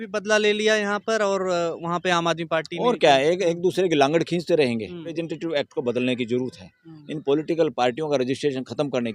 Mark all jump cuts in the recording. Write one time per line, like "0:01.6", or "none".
0:05.1